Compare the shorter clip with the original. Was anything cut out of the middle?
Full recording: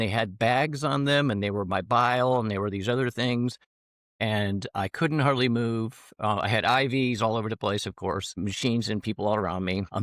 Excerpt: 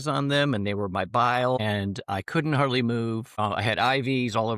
yes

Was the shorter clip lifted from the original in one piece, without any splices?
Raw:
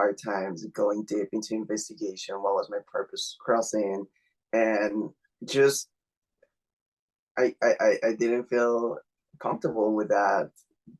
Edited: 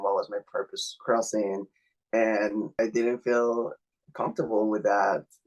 no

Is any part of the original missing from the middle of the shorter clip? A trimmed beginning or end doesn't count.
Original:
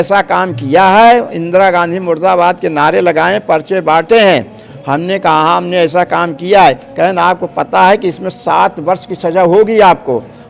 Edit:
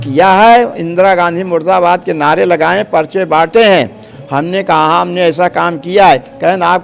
no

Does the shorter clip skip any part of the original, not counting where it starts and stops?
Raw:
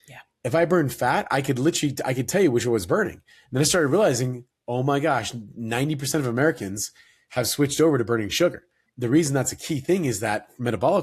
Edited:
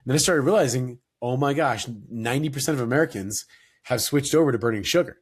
no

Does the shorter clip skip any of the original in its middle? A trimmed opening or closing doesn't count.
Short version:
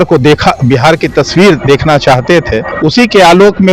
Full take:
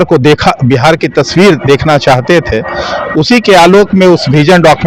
yes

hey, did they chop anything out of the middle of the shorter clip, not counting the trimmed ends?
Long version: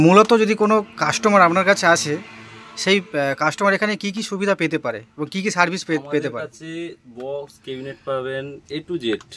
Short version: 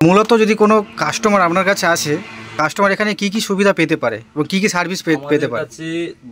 yes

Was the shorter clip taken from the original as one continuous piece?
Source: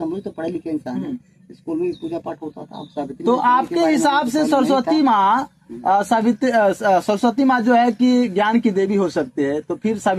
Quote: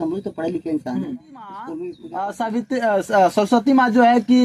no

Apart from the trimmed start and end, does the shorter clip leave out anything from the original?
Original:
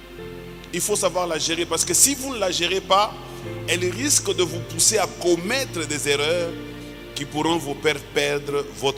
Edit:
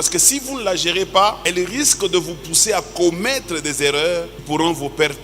yes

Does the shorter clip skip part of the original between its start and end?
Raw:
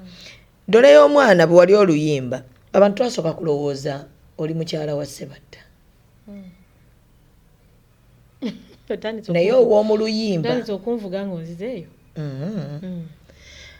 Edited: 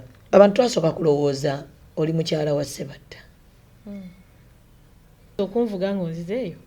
yes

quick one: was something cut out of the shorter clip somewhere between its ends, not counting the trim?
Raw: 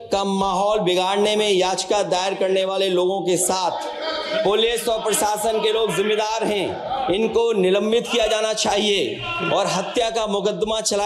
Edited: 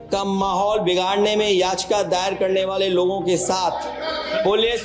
no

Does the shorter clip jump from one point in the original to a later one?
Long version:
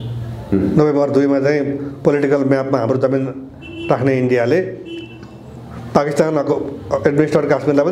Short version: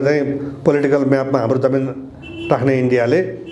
no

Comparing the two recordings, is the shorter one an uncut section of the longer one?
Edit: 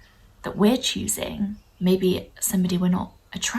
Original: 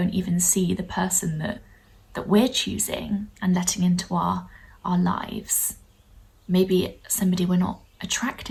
no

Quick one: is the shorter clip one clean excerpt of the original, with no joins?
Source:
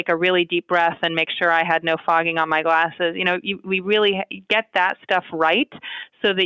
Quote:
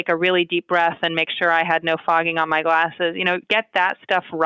no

